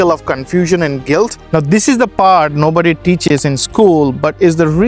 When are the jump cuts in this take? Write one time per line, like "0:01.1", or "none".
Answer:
0:01.4